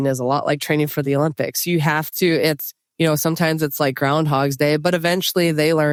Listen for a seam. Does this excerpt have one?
no; 0 cuts

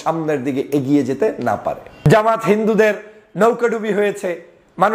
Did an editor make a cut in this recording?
yes; 1 cut; at 1.4 s

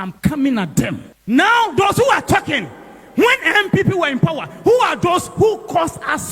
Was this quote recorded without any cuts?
no; 1 cut; at 1.1 s

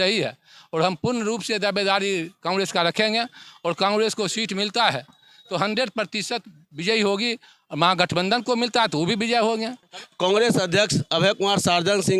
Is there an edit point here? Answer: yes; 1 cut; at 10.0 s

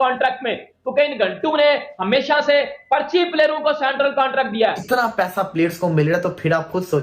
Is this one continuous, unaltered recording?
no; 1 cut; at 4.8 s

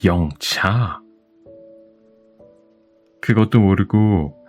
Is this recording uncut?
no; 2 cuts; at 1.0 s, 3.1 s

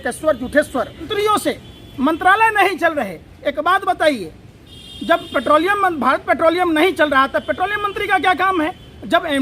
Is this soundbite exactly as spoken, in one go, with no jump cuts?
no; 1 cut; at 1.1 s

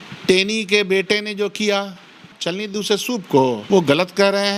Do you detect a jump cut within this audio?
yes; 2 cuts; at 2.3 s, 3.6 s

